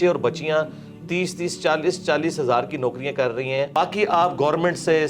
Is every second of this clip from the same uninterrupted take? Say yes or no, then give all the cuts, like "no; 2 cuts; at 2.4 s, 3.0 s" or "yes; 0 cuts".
no; 1 cut; at 3.8 s